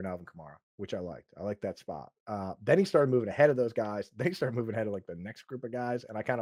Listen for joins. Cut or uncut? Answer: uncut